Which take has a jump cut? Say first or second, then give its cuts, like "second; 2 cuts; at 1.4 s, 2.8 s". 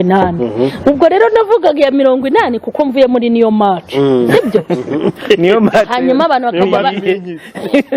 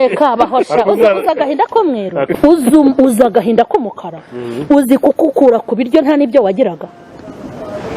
second; 1 cut; at 2.3 s